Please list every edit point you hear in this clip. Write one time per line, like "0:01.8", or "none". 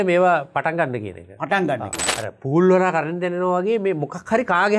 0:02.0